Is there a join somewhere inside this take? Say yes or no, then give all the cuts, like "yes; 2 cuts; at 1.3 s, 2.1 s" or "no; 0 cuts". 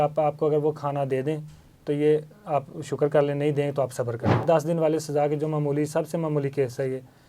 yes; 1 cut; at 4.4 s